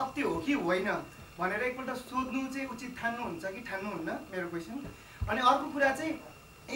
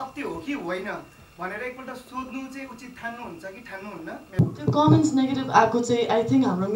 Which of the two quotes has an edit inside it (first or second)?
second